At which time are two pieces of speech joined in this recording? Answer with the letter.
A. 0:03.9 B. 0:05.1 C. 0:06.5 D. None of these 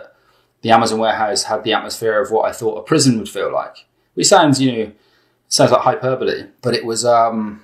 C